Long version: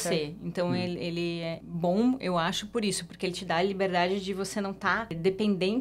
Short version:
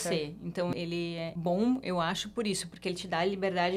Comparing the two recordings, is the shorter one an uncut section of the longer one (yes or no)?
no